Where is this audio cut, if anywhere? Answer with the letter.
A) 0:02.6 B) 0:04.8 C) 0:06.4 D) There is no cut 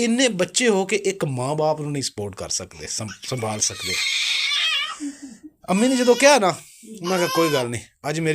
D